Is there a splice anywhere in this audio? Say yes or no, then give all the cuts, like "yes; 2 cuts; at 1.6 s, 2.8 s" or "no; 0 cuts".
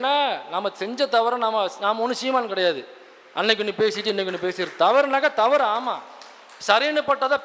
no; 0 cuts